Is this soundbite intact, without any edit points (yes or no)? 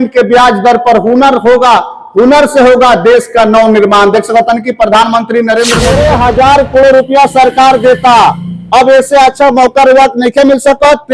no